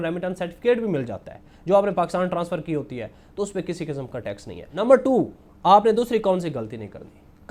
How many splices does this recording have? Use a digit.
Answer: 0